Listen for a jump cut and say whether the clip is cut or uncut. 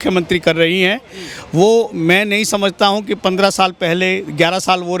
uncut